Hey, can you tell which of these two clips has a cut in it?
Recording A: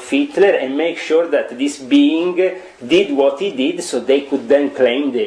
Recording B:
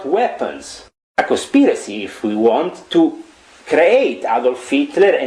B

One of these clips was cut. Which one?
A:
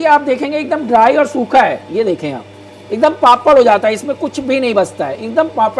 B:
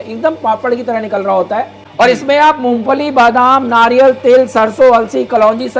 B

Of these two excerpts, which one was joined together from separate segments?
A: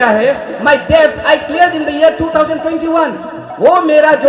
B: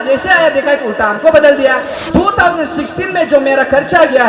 B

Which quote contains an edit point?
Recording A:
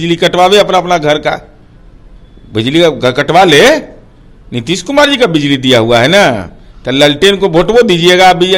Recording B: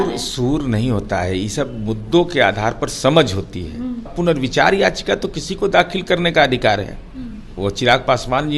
B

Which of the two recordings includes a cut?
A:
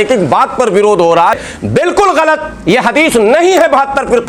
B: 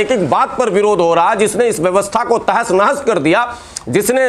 A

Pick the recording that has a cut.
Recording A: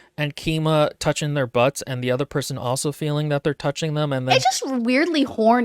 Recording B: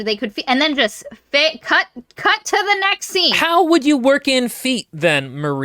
B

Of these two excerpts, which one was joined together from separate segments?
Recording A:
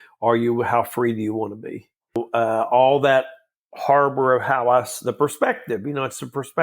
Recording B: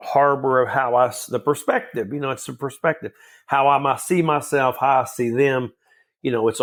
A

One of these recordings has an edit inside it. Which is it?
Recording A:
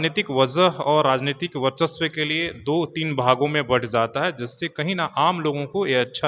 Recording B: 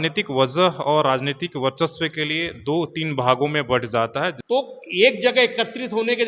B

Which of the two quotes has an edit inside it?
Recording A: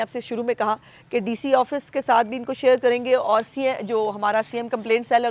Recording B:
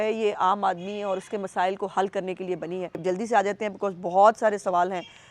B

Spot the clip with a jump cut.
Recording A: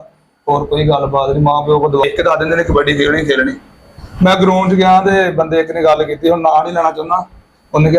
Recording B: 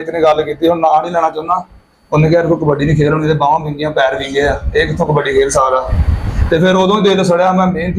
A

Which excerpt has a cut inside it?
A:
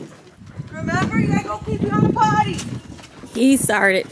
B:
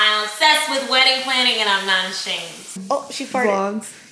B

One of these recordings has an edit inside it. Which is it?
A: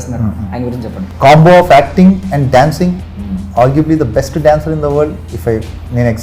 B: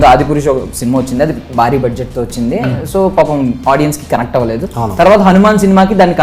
A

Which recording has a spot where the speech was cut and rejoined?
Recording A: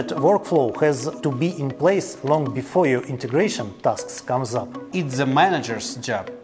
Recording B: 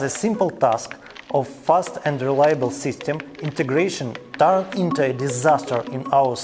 A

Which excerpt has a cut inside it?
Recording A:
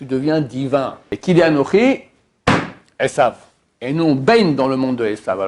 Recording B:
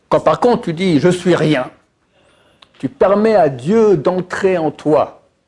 A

